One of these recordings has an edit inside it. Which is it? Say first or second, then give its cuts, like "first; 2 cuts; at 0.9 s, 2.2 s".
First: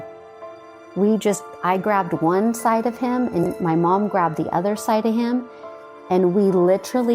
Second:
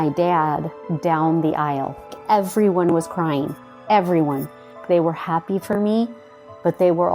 second; 2 cuts; at 2.2 s, 4.8 s